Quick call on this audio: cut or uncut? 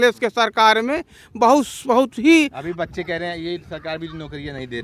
uncut